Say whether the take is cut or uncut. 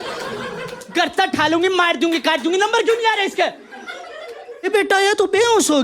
cut